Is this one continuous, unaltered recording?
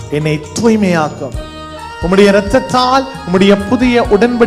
yes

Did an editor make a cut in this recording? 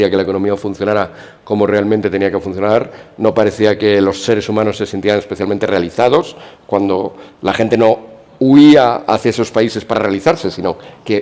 no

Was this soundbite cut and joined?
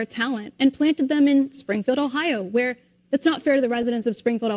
yes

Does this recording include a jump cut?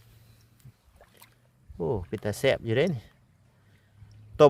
no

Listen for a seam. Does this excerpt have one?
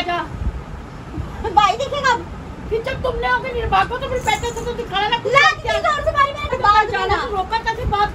yes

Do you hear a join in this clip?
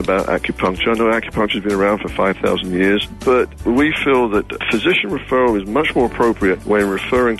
yes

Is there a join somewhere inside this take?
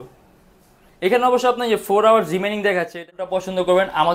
yes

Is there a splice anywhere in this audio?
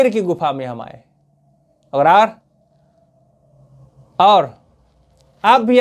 no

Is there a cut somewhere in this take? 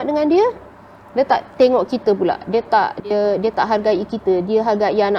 no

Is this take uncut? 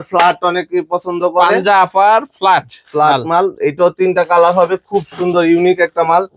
yes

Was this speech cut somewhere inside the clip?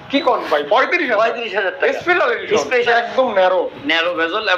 yes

